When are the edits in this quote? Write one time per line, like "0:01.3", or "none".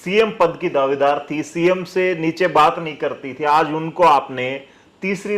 none